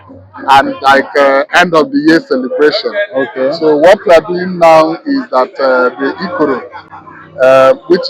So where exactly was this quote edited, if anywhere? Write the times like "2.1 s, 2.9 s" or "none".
none